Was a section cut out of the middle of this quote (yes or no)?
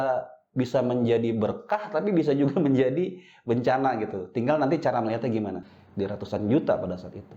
yes